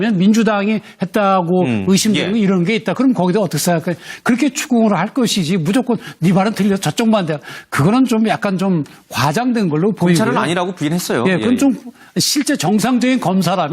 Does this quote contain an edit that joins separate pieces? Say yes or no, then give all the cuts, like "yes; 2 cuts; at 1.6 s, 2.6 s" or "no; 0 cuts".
yes; 1 cut; at 6.3 s